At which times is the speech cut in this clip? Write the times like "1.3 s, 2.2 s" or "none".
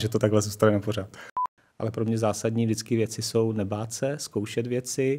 1.4 s